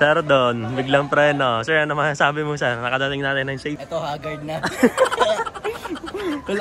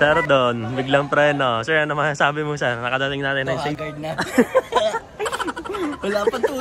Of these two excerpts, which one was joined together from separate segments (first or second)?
second